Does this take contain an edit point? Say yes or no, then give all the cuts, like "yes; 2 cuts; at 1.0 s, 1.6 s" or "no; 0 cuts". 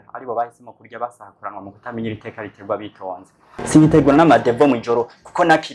yes; 1 cut; at 3.4 s